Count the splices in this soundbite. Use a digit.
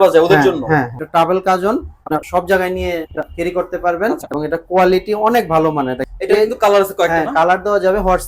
5